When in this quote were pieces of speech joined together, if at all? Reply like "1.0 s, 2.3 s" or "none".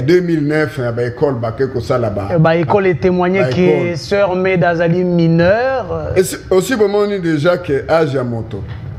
none